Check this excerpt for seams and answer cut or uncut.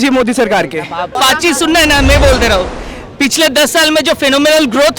cut